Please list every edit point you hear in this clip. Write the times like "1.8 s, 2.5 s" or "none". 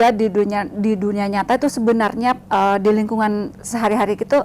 none